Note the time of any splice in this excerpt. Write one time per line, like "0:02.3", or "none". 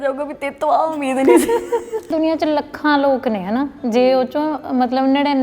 0:02.1